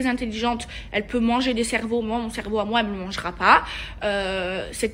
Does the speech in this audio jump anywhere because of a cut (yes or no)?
no